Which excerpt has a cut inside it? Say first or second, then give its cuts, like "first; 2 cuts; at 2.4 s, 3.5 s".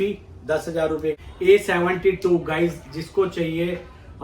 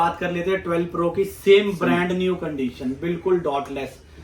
first; 1 cut; at 1.2 s